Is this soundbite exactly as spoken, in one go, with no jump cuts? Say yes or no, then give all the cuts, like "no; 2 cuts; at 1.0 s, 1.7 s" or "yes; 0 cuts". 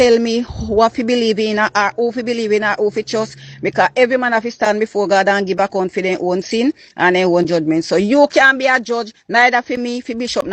yes; 0 cuts